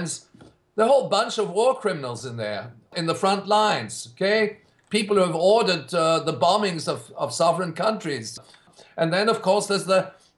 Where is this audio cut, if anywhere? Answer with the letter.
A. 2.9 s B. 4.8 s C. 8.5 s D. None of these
C